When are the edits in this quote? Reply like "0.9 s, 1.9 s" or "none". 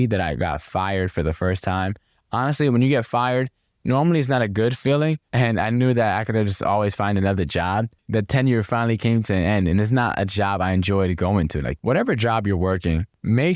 5.2 s, 8.0 s, 11.7 s